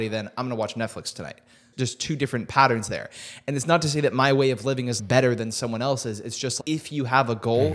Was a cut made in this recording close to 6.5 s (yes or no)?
yes